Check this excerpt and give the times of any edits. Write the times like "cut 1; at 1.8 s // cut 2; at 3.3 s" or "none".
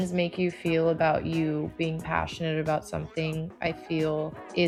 none